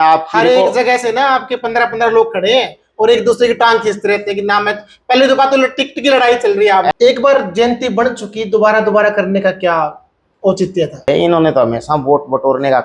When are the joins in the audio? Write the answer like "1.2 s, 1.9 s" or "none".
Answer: 6.9 s, 11.1 s